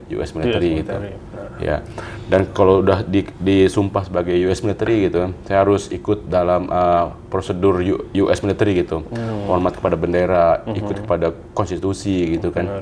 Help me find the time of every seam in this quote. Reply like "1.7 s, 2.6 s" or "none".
none